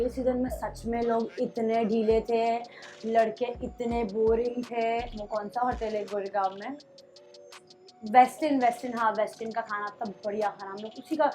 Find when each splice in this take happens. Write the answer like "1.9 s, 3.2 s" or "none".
5.2 s